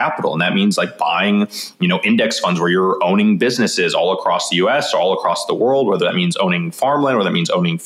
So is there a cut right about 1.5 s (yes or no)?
no